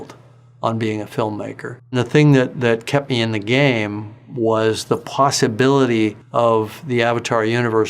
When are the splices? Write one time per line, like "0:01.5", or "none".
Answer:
0:02.0
0:06.2

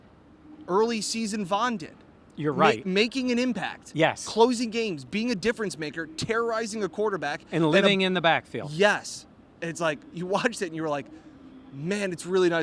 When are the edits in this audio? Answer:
none

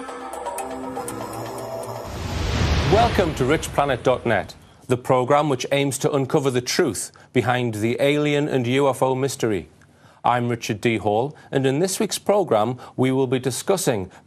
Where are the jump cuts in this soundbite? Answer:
none

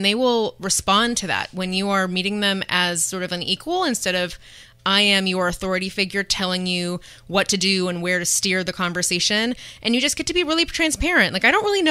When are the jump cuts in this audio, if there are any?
none

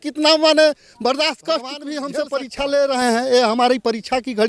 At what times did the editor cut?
0:02.1

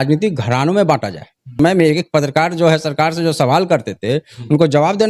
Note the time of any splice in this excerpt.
0:01.5

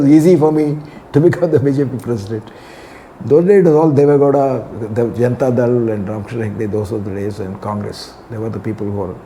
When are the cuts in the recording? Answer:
none

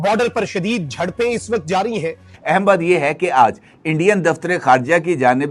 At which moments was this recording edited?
0:02.5

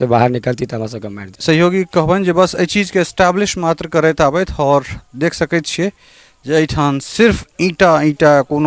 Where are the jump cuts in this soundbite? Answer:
0:01.3

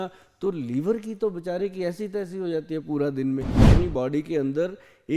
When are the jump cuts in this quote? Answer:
0:03.7

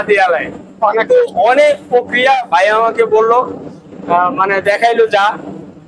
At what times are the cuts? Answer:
none

